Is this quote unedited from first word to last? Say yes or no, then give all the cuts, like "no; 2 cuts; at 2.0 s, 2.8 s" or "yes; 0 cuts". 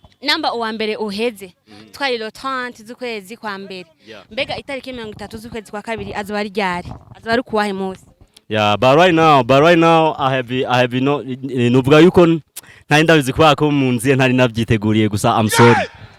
yes; 0 cuts